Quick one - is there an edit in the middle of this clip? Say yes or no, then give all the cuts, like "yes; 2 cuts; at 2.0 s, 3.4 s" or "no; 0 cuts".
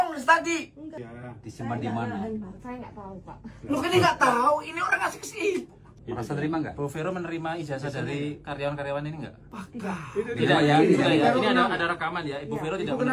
yes; 1 cut; at 1.0 s